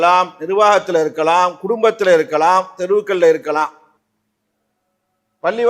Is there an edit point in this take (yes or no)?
no